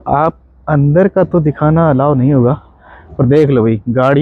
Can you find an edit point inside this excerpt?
no; 0 cuts

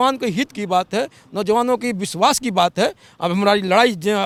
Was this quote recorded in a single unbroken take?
yes; 0 cuts

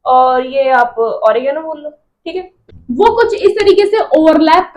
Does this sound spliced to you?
yes; 1 cut; at 2.6 s

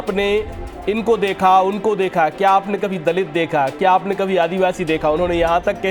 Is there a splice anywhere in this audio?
no; 0 cuts

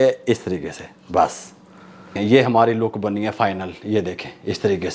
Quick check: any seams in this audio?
yes; 1 cut; at 2.1 s

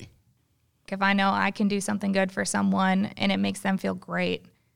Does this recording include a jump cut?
yes; 1 cut; at 0.9 s

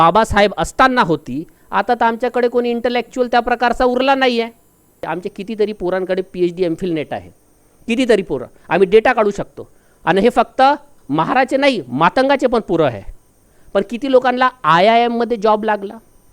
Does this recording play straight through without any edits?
no; 1 cut; at 5.0 s

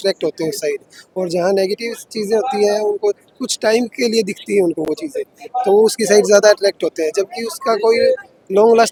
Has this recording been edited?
no; 0 cuts

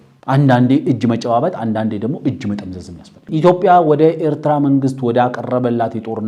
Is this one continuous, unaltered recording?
no; 1 cut; at 3.3 s

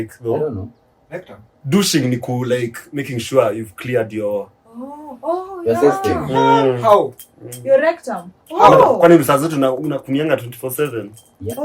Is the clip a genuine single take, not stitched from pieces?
yes; 0 cuts

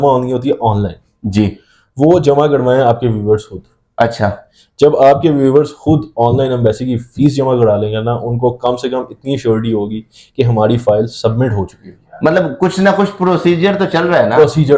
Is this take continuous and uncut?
yes; 0 cuts

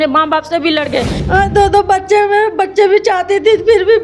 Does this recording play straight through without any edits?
no; 1 cut; at 1.2 s

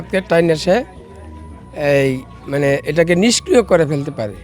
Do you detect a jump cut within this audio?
no; 0 cuts

